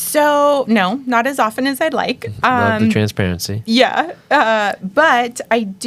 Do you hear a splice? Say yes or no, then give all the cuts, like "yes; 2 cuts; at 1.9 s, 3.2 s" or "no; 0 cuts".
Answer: no; 0 cuts